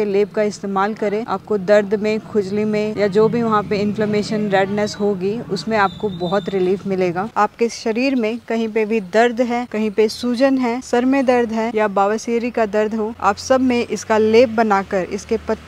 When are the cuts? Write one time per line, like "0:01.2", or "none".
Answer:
0:07.3